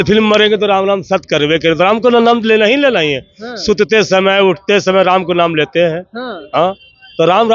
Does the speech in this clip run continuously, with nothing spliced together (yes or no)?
yes